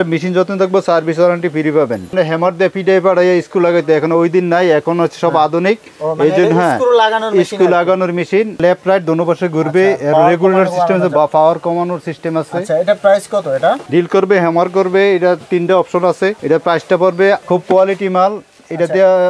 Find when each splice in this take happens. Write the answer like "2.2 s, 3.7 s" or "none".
2.1 s, 8.6 s, 13.8 s, 17.4 s